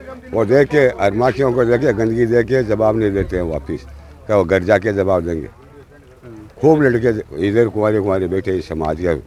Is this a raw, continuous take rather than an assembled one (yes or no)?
yes